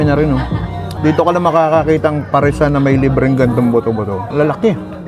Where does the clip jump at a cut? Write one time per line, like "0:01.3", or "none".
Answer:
0:00.9